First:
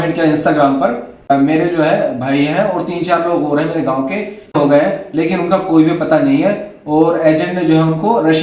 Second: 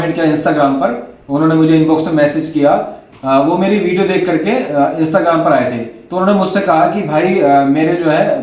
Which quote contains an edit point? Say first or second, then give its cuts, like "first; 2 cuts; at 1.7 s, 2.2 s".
first; 2 cuts; at 1.3 s, 4.5 s